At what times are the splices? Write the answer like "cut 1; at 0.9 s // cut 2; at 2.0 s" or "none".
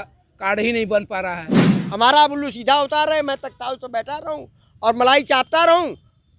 cut 1; at 1.8 s